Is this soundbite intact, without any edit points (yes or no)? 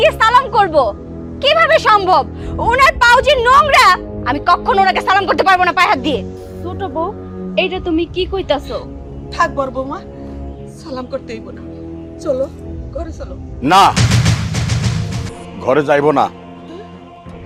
yes